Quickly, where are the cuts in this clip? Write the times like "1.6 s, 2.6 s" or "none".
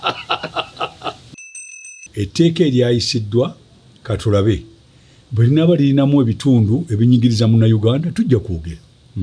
1.7 s

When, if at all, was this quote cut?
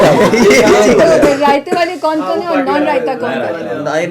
none

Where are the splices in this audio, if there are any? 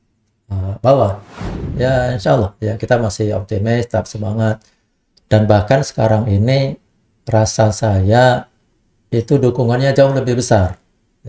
1.6 s

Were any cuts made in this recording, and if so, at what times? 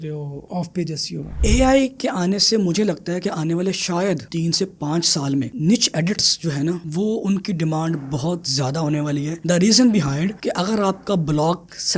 1.3 s

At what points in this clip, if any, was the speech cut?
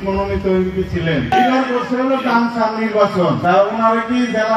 1.3 s, 3.4 s

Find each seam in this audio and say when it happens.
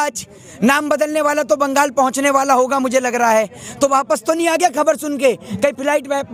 none

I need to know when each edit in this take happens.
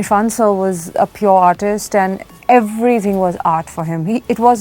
0.9 s, 2.3 s

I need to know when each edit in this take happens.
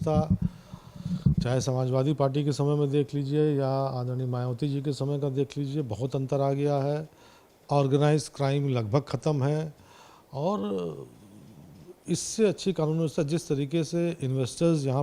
none

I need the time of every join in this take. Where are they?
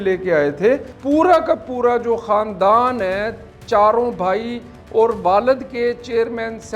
0.9 s

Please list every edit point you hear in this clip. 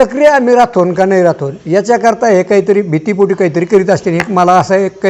none

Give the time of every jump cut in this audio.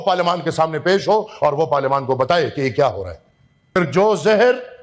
3.8 s

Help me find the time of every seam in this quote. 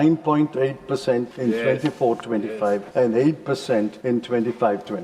1.3 s, 2.9 s, 4.0 s

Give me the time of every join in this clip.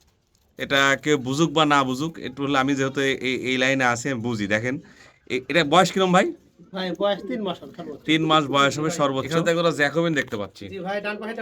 9.3 s

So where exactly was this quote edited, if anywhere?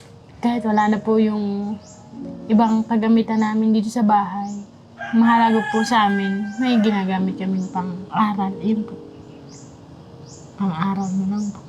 none

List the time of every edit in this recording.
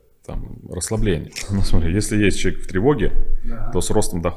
1.4 s

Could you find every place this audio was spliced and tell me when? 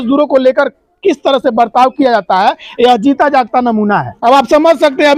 none

